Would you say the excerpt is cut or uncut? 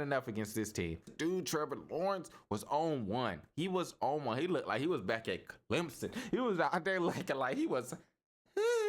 cut